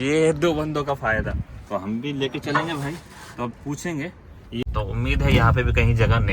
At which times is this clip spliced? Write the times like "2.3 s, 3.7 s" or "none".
4.6 s

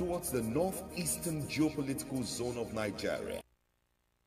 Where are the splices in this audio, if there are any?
3.4 s

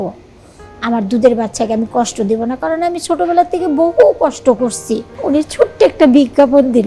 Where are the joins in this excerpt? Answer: 5.1 s

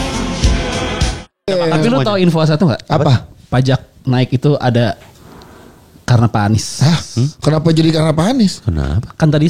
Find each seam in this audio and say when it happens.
1.3 s

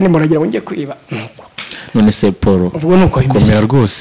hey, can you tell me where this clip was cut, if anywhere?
none

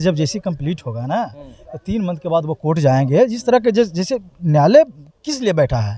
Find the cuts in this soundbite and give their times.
none

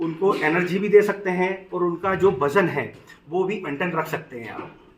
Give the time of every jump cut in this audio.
3.6 s

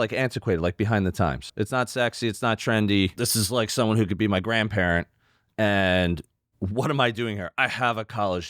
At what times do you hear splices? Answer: 1.5 s, 3.1 s

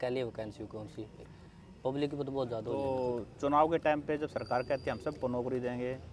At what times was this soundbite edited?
1.2 s, 2.8 s

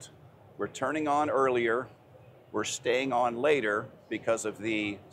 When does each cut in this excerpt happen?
none

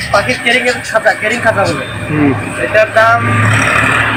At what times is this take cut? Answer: none

